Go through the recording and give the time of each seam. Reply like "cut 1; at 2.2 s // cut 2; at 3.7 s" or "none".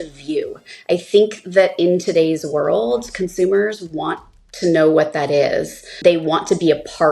cut 1; at 6.0 s